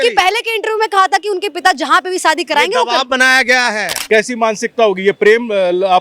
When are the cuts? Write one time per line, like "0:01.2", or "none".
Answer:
0:04.0